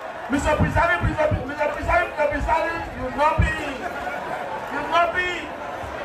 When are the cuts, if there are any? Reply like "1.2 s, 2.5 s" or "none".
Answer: none